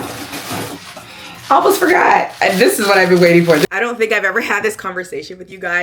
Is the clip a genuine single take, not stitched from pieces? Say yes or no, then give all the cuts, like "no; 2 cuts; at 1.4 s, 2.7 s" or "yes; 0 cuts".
no; 1 cut; at 3.7 s